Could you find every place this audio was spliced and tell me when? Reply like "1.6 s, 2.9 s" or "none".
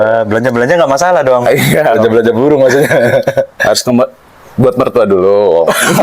none

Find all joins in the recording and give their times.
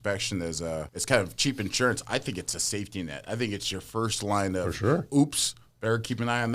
0.9 s

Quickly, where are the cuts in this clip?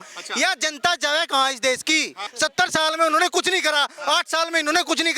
2.2 s

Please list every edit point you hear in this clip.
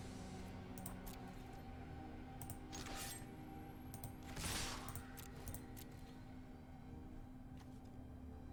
none

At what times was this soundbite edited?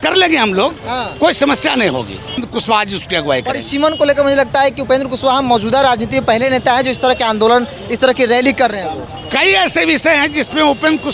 2.4 s

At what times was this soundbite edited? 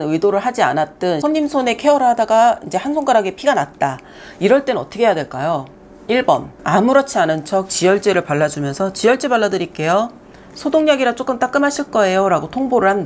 1.2 s, 6.5 s

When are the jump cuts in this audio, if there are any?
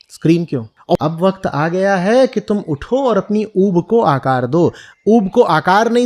1.0 s

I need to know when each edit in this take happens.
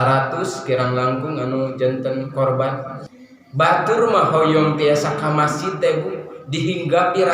3.0 s

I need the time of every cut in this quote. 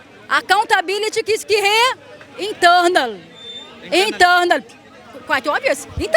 none

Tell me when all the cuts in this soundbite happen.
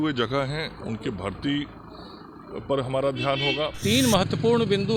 3.8 s

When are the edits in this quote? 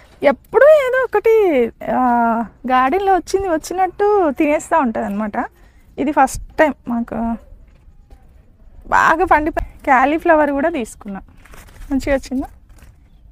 9.5 s

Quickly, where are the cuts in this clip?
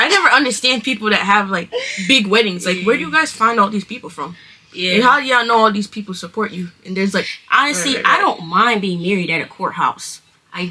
7.3 s

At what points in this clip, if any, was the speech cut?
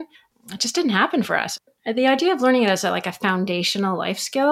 1.5 s

